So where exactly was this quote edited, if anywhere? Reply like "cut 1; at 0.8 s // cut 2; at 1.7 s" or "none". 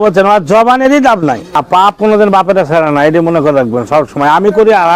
cut 1; at 1.6 s